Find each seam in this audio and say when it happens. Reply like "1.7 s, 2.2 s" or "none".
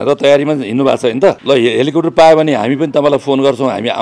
1.4 s